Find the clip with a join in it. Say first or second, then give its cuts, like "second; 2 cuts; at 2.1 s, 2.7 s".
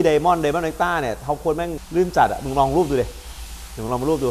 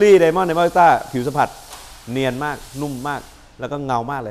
first; 1 cut; at 1.8 s